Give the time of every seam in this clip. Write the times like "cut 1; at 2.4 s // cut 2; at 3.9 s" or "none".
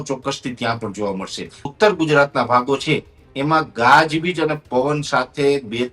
cut 1; at 1.7 s